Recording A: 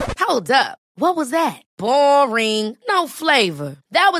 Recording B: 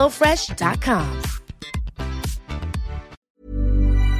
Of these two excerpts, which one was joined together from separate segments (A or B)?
B